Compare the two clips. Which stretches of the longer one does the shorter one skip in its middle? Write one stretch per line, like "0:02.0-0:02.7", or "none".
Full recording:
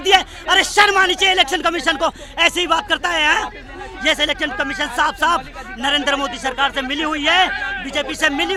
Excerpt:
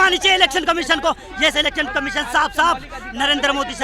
0:02.2-0:03.9